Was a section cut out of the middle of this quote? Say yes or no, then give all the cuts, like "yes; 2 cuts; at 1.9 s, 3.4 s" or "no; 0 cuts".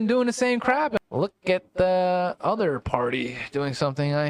yes; 1 cut; at 1.0 s